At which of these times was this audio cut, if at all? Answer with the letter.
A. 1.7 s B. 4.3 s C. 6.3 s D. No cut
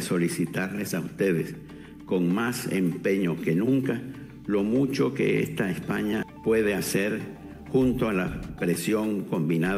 C